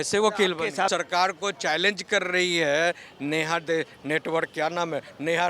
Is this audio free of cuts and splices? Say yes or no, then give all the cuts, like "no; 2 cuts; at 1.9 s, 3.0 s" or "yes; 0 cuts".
no; 1 cut; at 0.9 s